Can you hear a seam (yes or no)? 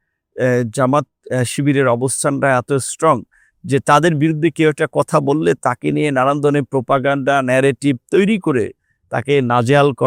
no